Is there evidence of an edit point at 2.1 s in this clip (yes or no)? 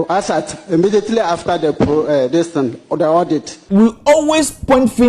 no